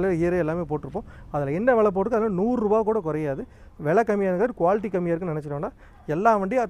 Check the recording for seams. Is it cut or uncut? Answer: cut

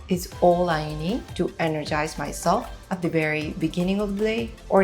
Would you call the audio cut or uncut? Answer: cut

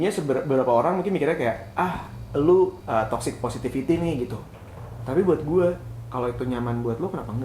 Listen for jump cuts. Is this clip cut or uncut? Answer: cut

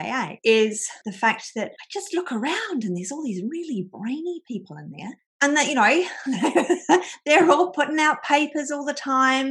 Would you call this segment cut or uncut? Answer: uncut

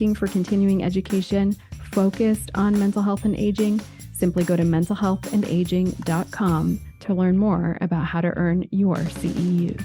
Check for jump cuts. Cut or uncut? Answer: uncut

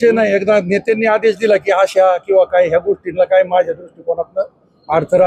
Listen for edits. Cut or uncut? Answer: uncut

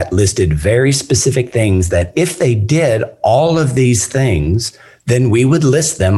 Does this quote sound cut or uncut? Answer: uncut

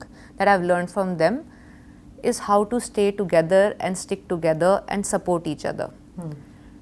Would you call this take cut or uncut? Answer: uncut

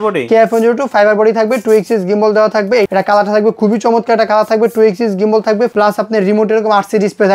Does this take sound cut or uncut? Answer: cut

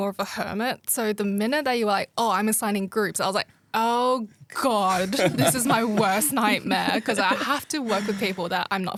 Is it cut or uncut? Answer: uncut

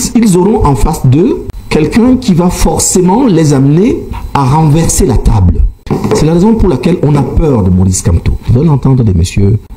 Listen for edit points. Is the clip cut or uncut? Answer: cut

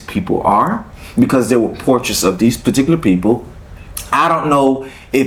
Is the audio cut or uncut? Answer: uncut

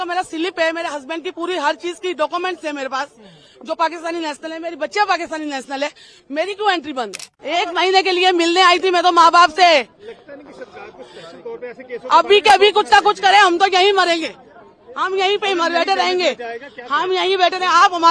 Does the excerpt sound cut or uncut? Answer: cut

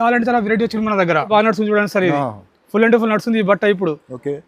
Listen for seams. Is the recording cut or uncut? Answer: cut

